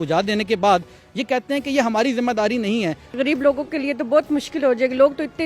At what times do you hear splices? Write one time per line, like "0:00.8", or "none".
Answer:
0:03.2